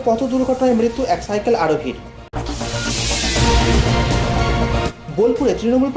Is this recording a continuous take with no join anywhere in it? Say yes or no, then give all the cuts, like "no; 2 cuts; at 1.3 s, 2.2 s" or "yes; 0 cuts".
yes; 0 cuts